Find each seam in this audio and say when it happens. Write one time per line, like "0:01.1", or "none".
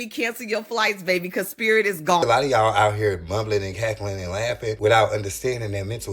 0:02.2
0:04.8